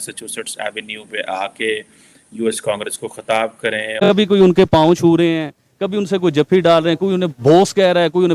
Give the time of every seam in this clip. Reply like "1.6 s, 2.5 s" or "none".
4.1 s